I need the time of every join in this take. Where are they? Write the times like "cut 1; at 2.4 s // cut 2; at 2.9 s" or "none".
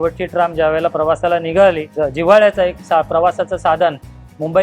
cut 1; at 1.9 s